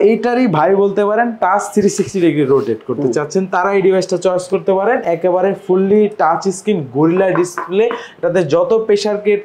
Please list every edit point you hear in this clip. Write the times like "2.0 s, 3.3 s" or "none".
none